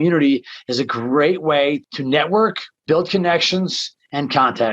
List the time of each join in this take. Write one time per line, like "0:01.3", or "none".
0:01.8
0:02.7